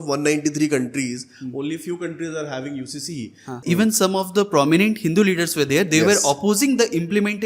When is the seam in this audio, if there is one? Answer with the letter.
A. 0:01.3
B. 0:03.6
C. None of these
B